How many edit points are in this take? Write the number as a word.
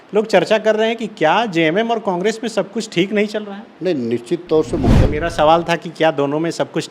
one